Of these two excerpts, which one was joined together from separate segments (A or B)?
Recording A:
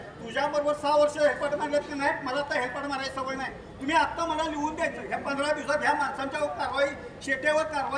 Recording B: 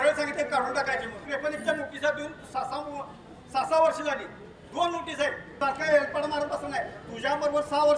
B